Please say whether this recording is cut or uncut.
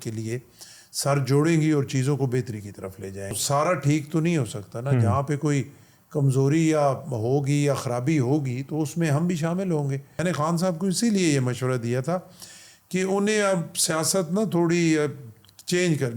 cut